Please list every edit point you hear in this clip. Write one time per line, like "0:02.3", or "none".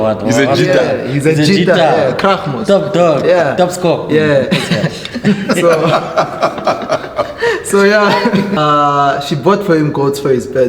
0:08.6